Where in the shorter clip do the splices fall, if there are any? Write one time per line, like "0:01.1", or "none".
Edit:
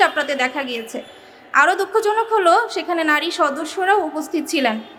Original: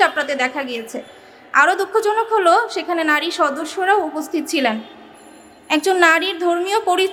none